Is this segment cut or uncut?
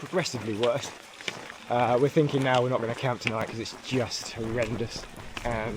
uncut